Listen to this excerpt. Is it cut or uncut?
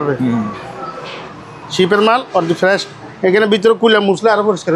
cut